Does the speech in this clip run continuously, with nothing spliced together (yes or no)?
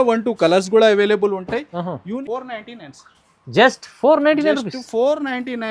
no